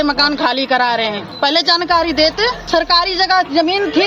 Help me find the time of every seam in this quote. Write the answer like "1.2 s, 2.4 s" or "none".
1.3 s, 2.6 s